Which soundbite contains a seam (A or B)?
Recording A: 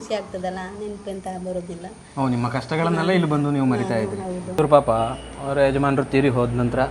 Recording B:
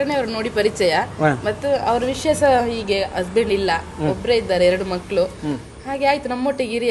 A